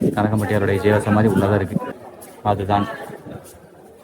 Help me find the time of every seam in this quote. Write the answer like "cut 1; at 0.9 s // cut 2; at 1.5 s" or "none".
cut 1; at 1.9 s